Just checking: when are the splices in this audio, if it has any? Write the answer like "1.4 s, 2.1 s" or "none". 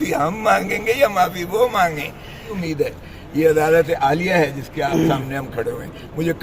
2.6 s